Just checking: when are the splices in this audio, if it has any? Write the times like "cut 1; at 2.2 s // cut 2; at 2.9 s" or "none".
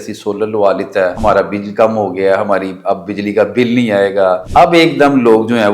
cut 1; at 1.2 s // cut 2; at 4.4 s